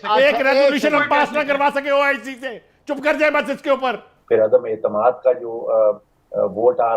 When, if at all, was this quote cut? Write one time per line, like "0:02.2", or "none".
0:04.1